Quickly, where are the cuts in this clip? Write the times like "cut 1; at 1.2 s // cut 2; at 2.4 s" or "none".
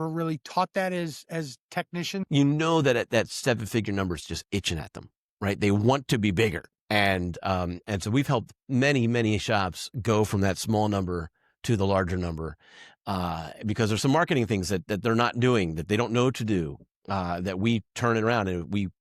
cut 1; at 2.2 s